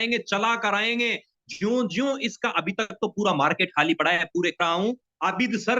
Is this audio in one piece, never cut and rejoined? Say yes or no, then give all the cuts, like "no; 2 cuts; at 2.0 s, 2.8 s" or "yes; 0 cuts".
no; 1 cut; at 4.6 s